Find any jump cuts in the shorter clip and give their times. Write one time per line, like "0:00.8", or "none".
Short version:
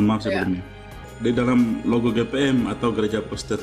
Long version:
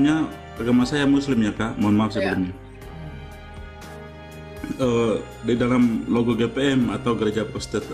0:01.1

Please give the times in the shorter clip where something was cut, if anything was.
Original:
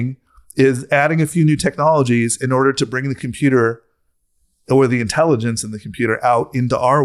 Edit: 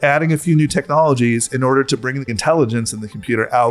0:02.4

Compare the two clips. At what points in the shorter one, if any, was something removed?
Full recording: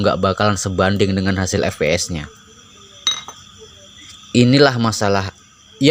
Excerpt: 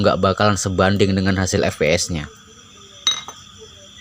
none

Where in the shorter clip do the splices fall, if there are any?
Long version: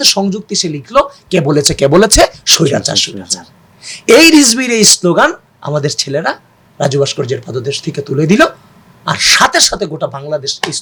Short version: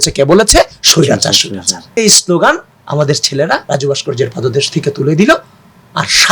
0:01.9
0:03.6

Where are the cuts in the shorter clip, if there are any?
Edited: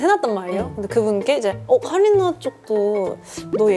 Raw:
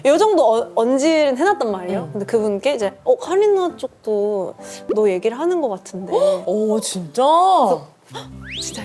none

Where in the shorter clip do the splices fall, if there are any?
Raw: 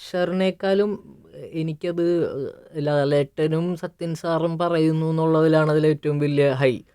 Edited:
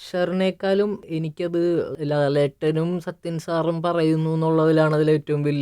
0:01.0
0:01.9

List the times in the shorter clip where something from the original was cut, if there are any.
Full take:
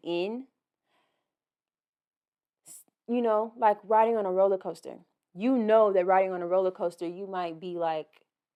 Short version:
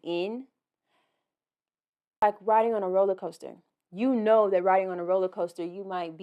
0:02.2

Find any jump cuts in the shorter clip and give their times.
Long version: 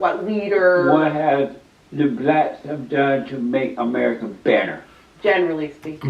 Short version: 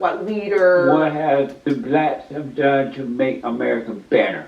0:01.6

